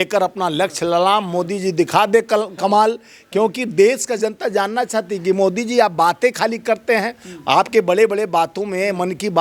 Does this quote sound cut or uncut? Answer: uncut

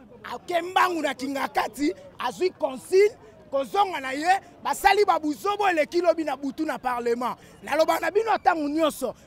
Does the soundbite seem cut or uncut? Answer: cut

